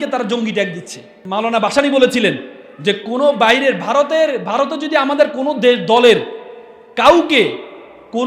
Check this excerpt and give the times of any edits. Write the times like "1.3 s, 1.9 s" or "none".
1.2 s

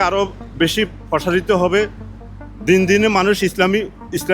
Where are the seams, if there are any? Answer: none

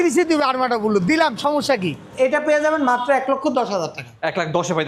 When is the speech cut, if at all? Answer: 2.0 s

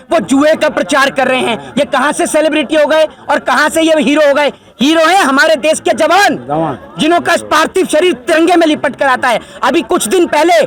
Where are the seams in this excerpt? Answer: none

